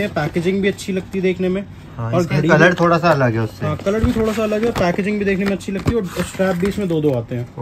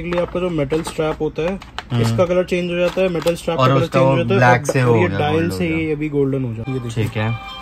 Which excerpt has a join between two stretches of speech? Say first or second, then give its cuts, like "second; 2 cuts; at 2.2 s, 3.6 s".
second; 1 cut; at 6.6 s